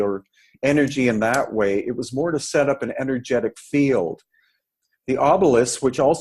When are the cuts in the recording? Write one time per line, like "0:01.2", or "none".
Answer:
0:04.6